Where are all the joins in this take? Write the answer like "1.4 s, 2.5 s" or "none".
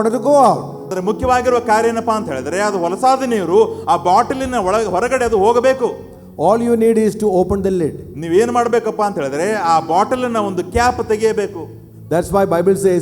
0.9 s